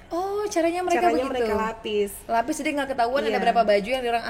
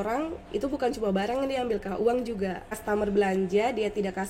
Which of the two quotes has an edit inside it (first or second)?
second